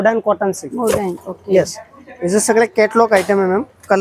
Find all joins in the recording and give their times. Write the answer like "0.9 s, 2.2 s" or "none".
none